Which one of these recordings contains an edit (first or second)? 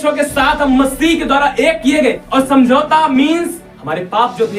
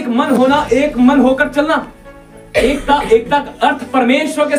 first